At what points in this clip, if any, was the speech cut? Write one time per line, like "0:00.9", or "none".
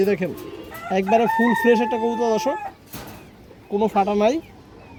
none